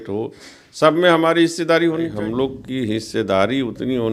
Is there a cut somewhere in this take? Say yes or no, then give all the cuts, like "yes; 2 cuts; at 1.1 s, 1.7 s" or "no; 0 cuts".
yes; 1 cut; at 2.1 s